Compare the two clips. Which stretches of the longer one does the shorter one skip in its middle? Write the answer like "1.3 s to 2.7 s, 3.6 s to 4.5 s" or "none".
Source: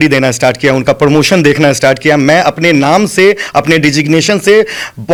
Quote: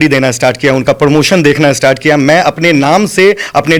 none

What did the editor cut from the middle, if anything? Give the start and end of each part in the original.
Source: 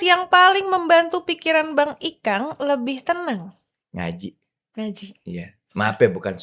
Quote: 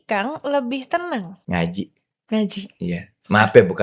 3.5 s to 3.8 s

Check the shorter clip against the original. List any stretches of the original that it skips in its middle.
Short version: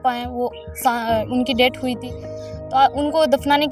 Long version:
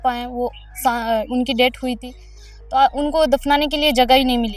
none

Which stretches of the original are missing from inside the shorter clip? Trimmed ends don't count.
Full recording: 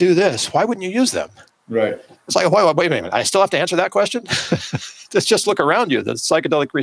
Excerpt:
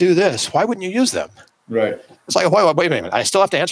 none

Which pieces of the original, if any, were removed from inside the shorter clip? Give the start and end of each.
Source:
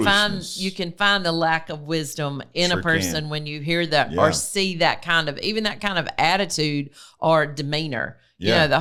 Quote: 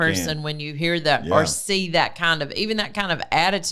none

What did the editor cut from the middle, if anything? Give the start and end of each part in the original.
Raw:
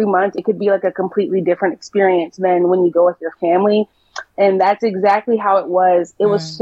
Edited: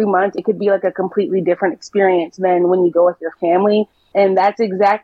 4.0 s to 4.2 s

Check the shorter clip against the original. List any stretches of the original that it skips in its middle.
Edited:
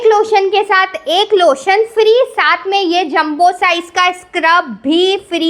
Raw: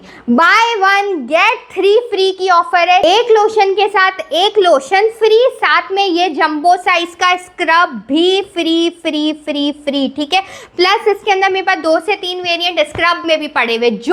none

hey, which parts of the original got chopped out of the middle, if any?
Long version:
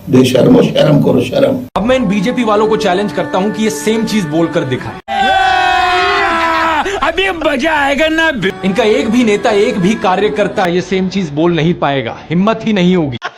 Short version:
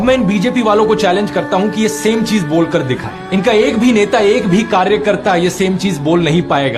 5.1 s to 8.6 s

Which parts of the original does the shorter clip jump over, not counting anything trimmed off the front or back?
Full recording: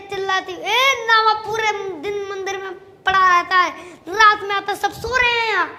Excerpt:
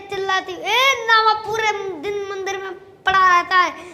none

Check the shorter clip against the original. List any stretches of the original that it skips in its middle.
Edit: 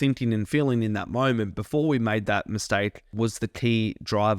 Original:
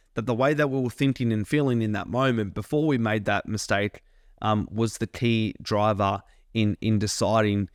4.1 s to 4.7 s

